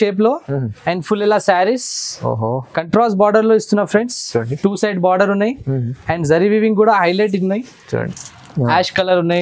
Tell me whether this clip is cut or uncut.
cut